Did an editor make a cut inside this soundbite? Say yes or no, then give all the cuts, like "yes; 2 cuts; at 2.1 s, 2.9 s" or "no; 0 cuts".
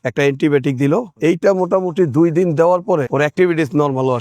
yes; 1 cut; at 3.0 s